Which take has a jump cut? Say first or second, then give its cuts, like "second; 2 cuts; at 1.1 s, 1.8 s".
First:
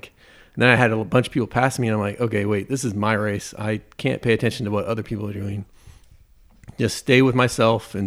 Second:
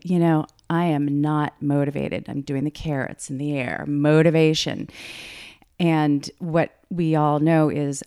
second; 1 cut; at 5.6 s